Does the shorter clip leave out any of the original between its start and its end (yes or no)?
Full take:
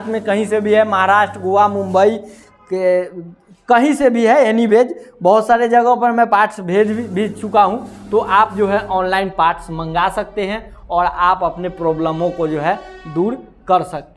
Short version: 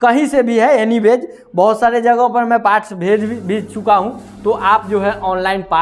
no